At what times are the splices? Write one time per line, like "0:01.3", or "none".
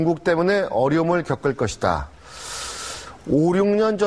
0:02.6